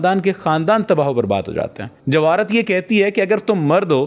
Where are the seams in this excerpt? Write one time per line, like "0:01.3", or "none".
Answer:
0:01.8